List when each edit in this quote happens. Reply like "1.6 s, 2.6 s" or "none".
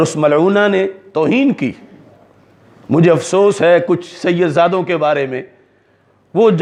none